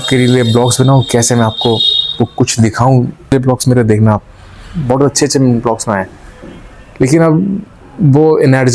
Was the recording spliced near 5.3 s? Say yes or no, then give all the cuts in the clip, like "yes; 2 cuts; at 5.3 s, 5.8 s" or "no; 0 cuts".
no; 1 cut; at 3.3 s